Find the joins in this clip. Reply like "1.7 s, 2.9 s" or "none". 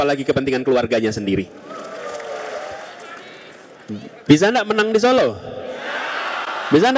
2.8 s